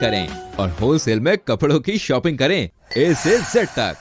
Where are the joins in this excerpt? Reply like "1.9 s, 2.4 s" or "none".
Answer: none